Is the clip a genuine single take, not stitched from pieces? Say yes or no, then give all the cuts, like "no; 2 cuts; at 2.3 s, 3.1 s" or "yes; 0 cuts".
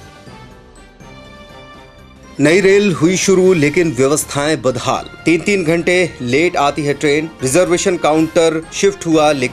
yes; 0 cuts